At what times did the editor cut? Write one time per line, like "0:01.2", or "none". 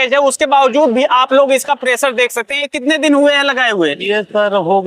0:02.7